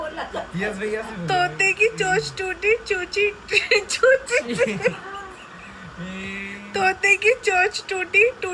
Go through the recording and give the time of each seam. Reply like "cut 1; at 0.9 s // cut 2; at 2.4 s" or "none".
none

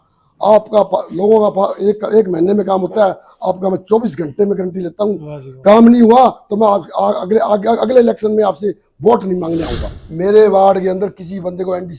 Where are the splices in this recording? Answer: cut 1; at 9.8 s

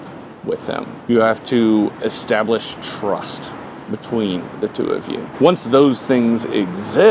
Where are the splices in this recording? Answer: cut 1; at 1.0 s // cut 2; at 5.3 s

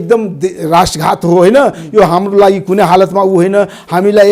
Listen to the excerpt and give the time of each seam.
none

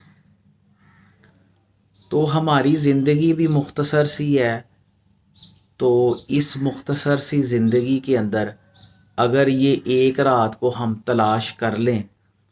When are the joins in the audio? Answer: none

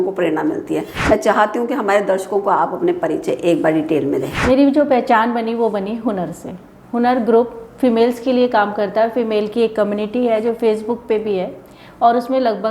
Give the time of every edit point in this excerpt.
cut 1; at 0.9 s // cut 2; at 4.3 s

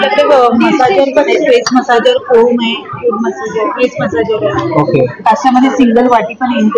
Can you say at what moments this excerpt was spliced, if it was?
none

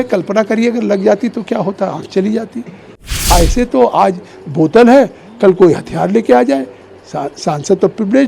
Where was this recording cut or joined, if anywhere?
cut 1; at 3.2 s

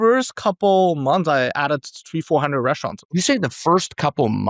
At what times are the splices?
cut 1; at 3.1 s

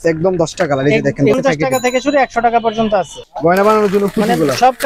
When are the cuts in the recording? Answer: cut 1; at 1.4 s // cut 2; at 3.2 s

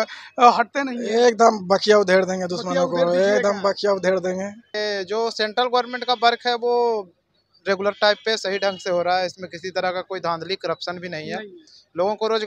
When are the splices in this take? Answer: cut 1; at 4.7 s

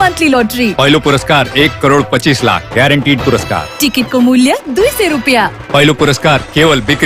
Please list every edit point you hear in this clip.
none

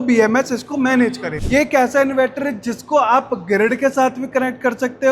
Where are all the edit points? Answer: cut 1; at 1.4 s

